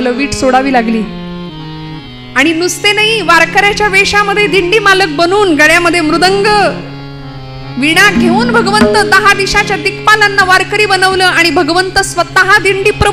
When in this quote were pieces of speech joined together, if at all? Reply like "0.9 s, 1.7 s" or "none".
none